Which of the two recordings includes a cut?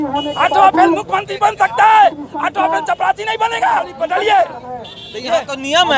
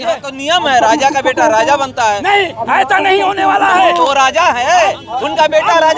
first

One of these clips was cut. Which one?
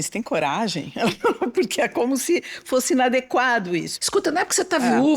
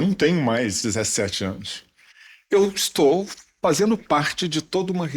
first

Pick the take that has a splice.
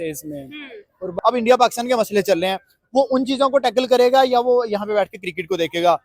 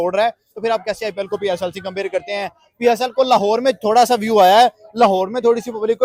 first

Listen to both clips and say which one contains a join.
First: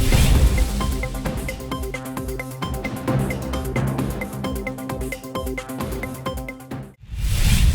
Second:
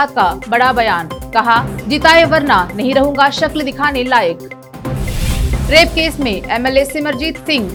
first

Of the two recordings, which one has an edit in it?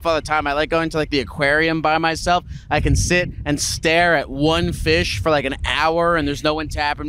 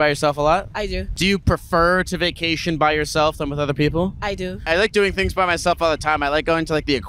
second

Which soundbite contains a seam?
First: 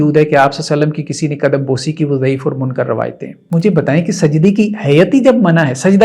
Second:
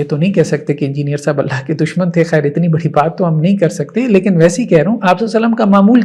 first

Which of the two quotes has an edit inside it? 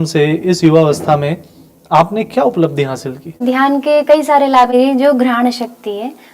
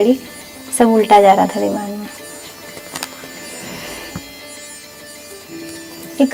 first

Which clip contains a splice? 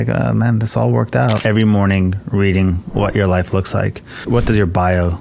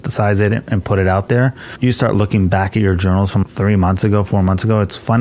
first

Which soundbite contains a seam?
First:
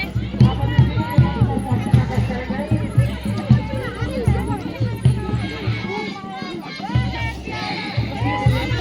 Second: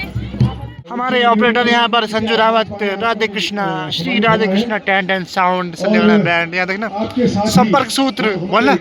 second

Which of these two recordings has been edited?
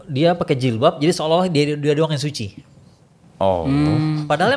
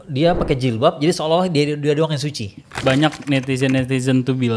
second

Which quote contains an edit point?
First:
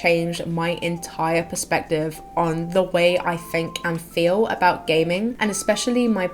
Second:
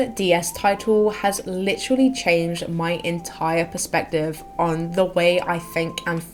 first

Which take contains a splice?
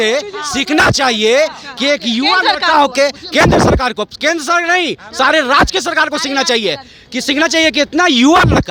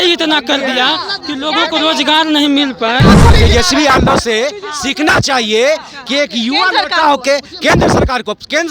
second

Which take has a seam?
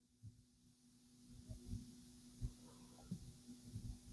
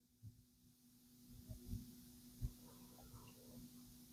first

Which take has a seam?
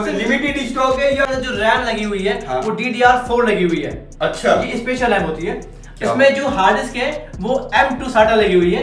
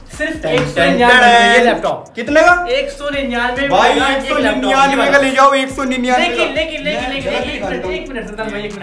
first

